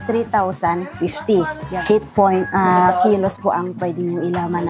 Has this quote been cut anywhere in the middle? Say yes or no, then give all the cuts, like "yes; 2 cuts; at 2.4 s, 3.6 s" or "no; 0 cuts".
yes; 1 cut; at 1.7 s